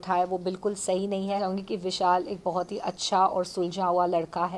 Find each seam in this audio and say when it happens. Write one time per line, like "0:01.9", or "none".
0:01.5

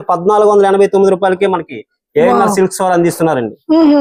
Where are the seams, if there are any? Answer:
none

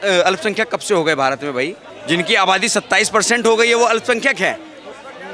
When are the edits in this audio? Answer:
0:01.9

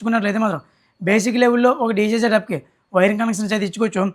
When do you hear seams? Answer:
none

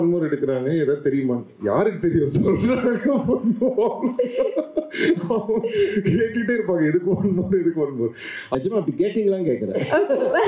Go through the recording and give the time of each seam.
0:08.5

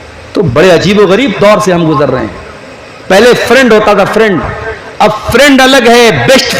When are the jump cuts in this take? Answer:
none

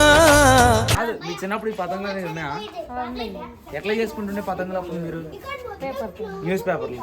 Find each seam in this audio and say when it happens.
0:01.0

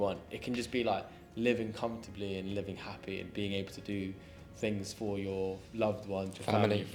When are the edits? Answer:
none

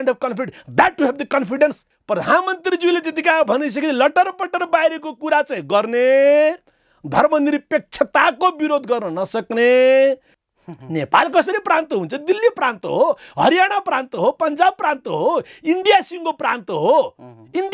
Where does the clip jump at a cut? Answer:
0:01.9
0:10.3

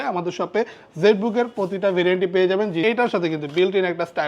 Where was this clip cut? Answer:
0:02.8

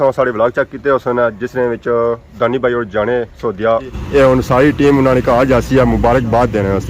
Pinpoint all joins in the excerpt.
0:04.0

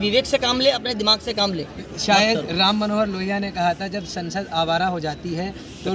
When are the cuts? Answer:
0:01.8

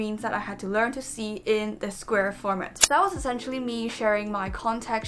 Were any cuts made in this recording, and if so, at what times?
0:02.8

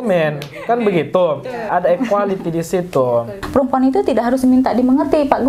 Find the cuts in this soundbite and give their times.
0:01.7
0:03.4

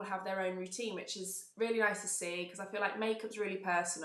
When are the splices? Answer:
none

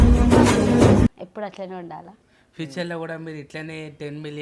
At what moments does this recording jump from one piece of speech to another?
none

